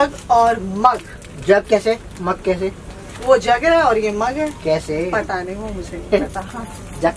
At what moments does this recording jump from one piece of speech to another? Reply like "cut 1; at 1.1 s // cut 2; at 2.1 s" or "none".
none